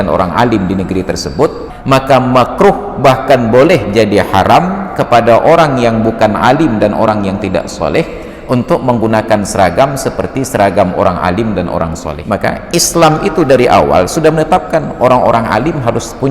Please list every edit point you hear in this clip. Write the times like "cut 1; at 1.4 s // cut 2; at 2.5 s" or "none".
cut 1; at 1.7 s // cut 2; at 12.1 s